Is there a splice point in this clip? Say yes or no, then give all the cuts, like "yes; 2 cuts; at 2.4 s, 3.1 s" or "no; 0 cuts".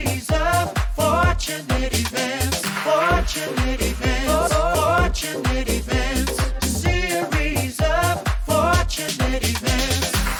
no; 0 cuts